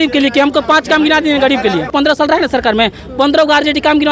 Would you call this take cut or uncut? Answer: cut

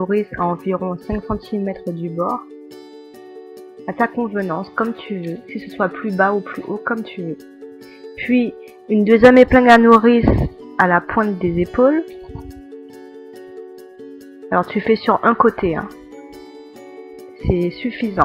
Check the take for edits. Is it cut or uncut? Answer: cut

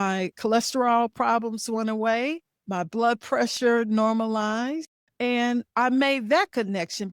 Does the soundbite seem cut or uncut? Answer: cut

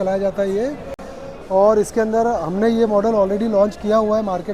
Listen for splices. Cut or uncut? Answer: uncut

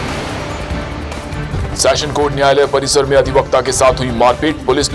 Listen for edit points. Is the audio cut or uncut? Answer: cut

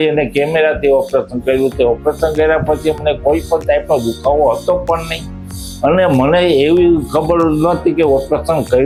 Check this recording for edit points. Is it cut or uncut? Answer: uncut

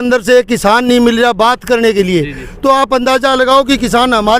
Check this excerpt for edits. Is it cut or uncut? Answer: uncut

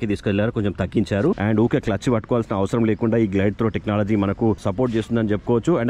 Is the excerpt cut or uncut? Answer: cut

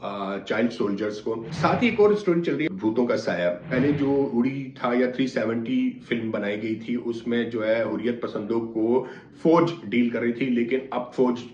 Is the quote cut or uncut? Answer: cut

